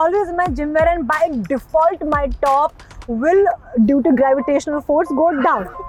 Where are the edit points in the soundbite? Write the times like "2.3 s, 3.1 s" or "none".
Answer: none